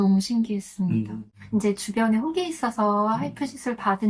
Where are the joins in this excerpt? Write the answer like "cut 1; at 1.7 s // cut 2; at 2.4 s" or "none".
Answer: cut 1; at 1.4 s